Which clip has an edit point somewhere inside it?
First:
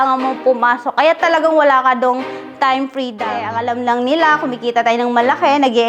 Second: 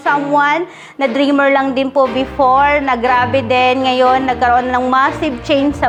first; 1 cut; at 3.5 s

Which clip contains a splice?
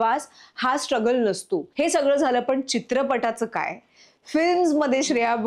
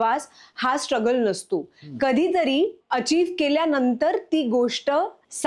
first; 1 cut; at 1.7 s

